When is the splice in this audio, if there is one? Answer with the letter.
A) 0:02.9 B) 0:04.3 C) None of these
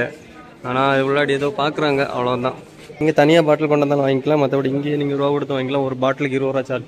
A